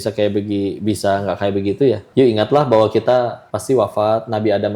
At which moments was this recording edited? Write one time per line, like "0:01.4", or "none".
0:02.0
0:03.5